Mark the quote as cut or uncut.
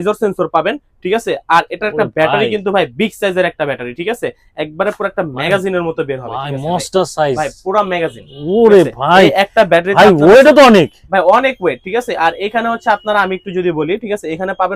uncut